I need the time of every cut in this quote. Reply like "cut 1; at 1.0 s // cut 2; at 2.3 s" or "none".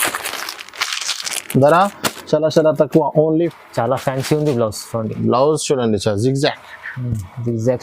cut 1; at 3.5 s